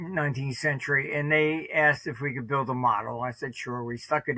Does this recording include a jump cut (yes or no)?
no